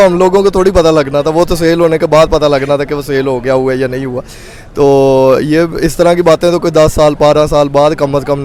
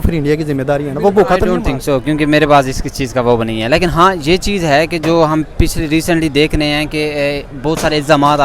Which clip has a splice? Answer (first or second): second